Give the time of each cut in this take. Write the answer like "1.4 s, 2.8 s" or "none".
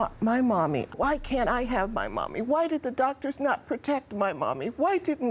1.0 s